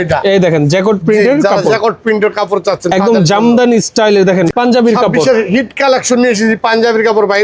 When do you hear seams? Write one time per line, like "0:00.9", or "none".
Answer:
0:04.5